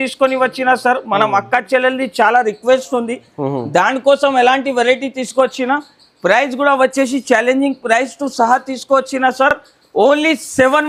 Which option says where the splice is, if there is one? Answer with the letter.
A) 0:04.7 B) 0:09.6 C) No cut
C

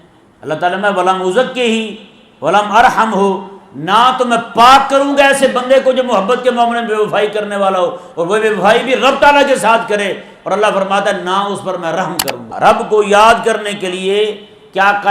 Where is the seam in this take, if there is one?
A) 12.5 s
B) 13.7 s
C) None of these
A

